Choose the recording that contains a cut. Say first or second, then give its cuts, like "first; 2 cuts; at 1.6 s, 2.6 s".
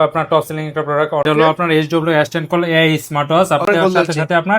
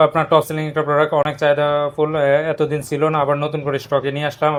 first; 2 cuts; at 1.2 s, 3.7 s